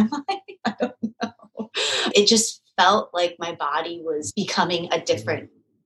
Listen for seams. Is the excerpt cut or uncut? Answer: cut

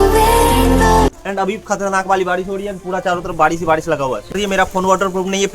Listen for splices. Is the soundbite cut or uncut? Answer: cut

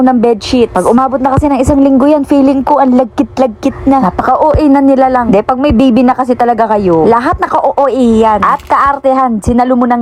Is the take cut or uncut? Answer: uncut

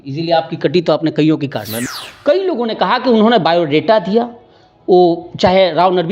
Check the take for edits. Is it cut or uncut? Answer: cut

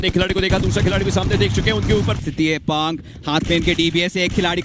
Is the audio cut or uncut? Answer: cut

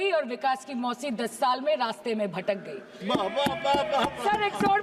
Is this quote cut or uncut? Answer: uncut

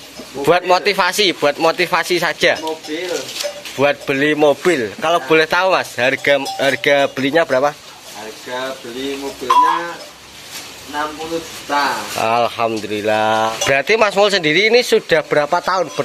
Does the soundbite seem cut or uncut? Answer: cut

